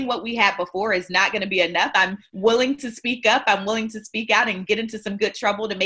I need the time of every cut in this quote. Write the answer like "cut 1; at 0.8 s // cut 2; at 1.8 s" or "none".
cut 1; at 1.9 s